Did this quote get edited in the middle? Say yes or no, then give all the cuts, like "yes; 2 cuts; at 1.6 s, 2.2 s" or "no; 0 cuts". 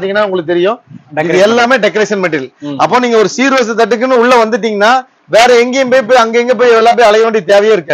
no; 0 cuts